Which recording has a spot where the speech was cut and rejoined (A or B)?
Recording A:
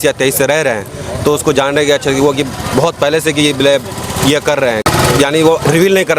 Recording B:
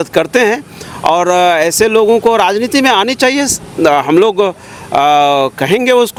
A